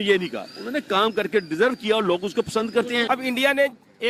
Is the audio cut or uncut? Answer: uncut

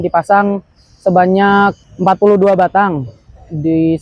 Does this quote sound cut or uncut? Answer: cut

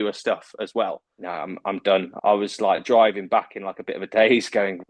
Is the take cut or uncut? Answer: cut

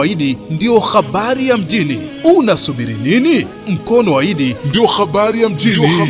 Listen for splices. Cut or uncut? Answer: uncut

